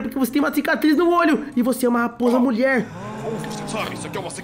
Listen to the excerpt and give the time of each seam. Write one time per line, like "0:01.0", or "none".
none

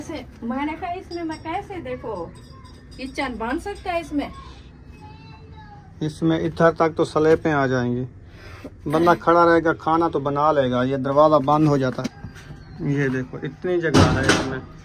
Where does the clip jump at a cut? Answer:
0:12.0

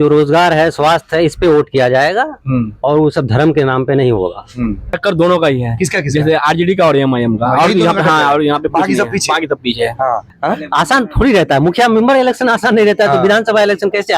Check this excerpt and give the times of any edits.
0:04.9
0:10.3

